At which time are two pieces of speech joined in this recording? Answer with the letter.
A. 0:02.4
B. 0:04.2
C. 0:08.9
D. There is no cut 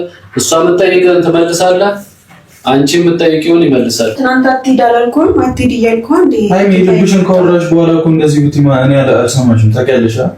B